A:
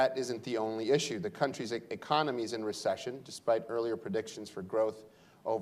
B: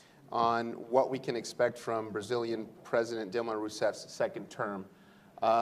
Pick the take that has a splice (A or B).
A